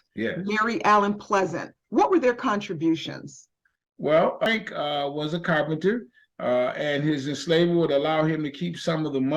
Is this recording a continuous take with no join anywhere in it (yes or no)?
no